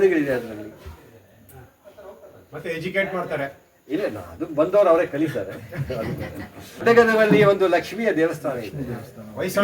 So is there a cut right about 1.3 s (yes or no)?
no